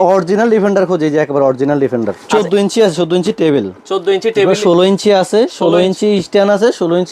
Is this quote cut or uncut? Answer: cut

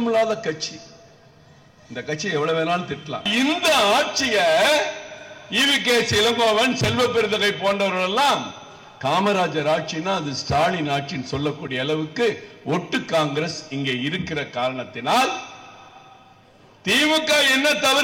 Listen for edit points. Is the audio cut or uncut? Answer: cut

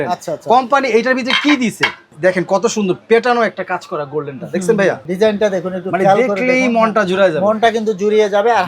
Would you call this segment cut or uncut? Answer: cut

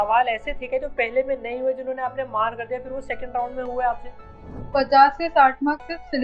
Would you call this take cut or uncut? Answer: cut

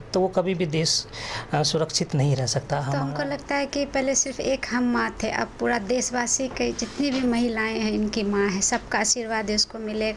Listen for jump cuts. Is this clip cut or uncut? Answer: cut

